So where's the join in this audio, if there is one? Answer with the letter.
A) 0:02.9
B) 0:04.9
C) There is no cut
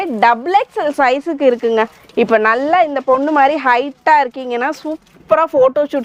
C